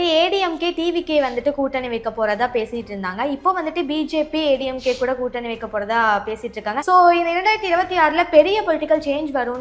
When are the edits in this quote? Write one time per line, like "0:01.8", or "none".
0:06.8